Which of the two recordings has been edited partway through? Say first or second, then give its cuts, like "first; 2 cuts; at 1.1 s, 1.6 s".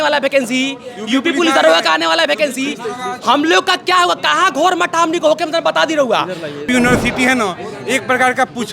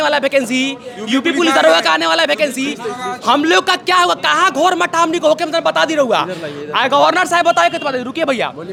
first; 1 cut; at 6.6 s